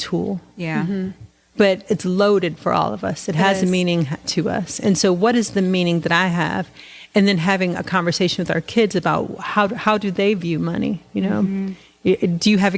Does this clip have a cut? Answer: yes; 1 cut; at 1.8 s

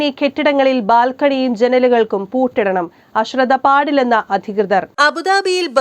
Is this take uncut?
yes; 0 cuts

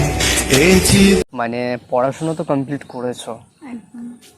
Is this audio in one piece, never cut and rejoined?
no; 1 cut; at 1.3 s

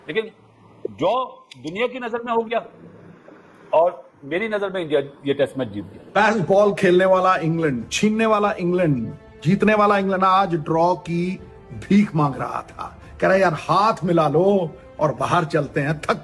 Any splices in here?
yes; 1 cut; at 6.2 s

